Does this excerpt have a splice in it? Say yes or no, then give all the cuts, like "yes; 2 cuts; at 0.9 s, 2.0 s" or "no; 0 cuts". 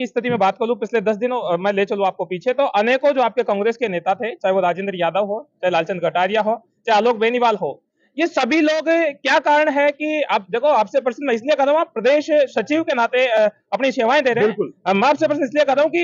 no; 0 cuts